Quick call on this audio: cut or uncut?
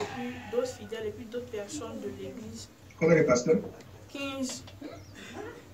uncut